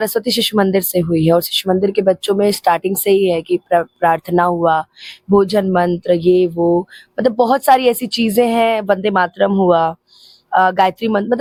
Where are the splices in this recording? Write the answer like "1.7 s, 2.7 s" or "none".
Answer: none